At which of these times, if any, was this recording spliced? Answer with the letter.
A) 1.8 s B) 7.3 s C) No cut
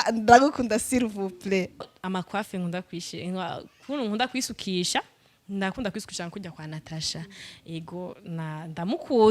A